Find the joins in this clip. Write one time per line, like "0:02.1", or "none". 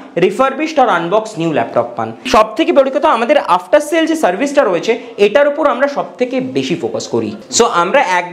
0:02.1
0:07.4